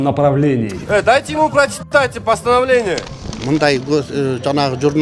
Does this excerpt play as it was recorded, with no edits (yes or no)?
no